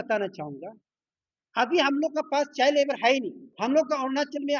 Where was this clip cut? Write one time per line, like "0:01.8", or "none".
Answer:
0:03.4